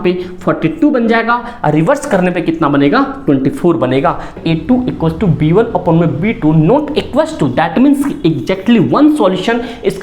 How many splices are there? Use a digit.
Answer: 1